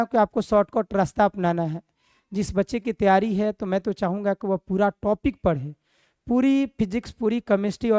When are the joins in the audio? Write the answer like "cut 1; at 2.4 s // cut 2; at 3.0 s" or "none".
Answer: none